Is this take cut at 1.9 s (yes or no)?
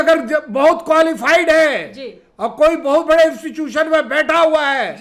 no